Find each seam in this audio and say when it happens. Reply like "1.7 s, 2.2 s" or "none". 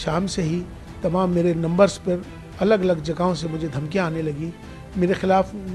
none